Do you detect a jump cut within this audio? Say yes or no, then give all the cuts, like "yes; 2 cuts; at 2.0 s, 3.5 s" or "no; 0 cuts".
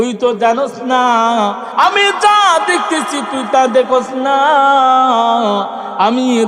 yes; 1 cut; at 1.6 s